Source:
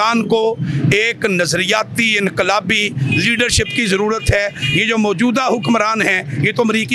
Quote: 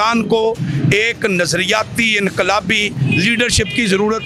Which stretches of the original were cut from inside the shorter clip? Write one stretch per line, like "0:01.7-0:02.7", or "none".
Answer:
none